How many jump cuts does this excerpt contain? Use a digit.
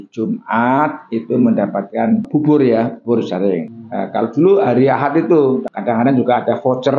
1